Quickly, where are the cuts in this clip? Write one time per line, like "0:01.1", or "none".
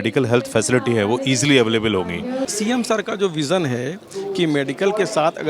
0:02.5